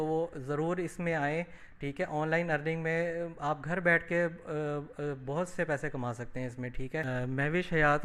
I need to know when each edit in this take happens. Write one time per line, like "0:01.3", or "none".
0:07.0